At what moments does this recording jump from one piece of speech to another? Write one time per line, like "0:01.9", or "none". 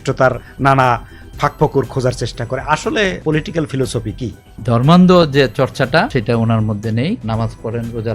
0:03.2
0:04.5
0:06.1
0:07.2